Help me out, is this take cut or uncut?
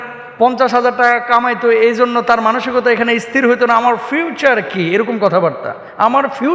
uncut